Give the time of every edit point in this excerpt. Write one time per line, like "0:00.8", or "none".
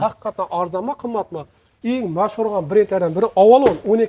0:01.6